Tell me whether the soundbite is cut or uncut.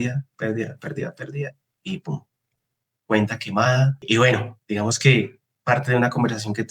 uncut